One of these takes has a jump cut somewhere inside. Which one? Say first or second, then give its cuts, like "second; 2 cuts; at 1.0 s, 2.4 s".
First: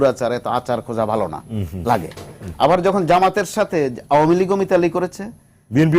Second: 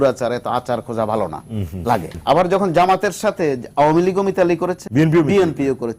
second; 2 cuts; at 2.1 s, 4.8 s